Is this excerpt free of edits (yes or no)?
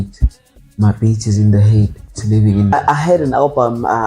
no